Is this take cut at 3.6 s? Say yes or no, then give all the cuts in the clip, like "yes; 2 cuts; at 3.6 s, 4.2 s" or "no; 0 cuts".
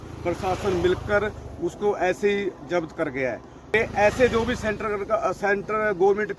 yes; 1 cut; at 3.6 s